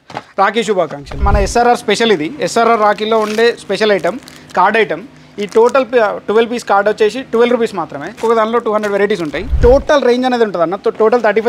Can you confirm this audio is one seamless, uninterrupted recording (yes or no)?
no